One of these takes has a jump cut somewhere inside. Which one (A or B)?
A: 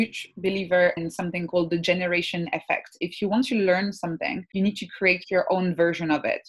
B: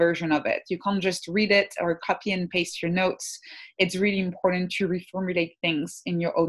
A